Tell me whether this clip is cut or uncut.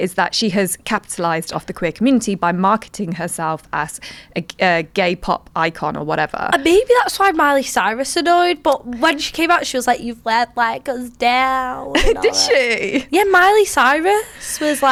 uncut